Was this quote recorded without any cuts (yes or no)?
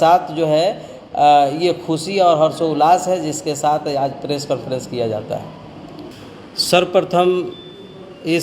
yes